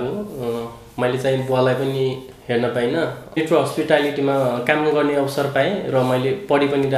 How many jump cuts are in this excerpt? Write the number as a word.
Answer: one